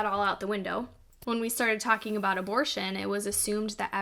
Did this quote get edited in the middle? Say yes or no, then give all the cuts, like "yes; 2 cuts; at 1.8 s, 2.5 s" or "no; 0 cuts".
yes; 1 cut; at 1.1 s